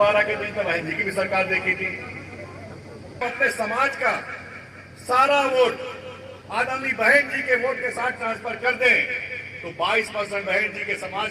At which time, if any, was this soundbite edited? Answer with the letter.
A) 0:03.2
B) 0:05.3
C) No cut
A